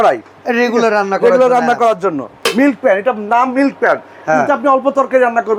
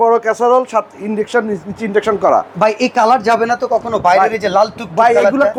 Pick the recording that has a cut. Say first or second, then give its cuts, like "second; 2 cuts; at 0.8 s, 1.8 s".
first; 1 cut; at 2.4 s